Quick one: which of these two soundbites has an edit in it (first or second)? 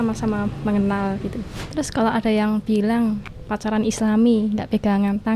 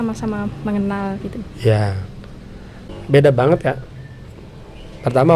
first